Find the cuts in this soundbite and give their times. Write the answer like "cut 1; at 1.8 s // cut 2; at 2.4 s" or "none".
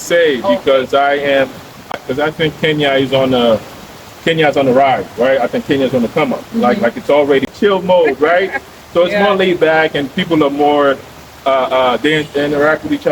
cut 1; at 1.9 s // cut 2; at 7.5 s